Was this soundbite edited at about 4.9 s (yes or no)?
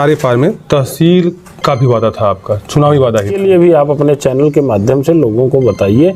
no